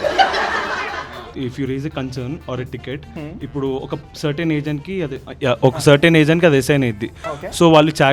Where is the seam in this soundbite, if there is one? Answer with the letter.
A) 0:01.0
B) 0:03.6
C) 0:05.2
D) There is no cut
A